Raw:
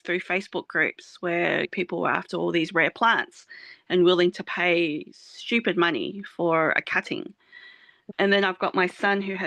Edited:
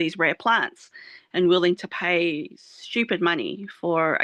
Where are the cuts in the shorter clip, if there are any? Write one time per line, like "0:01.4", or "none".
none